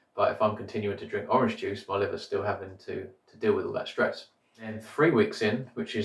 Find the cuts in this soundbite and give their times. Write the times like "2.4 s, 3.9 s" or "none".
4.8 s

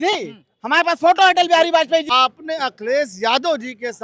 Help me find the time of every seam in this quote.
2.1 s

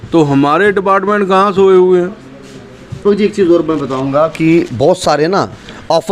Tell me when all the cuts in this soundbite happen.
3.0 s

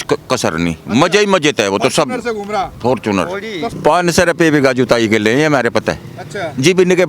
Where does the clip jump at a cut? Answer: 3.7 s

